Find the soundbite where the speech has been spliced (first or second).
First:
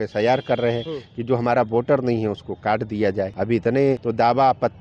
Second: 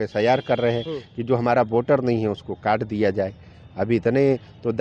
first